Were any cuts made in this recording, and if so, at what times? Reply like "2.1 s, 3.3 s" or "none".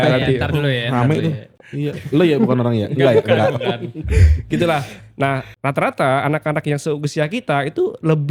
none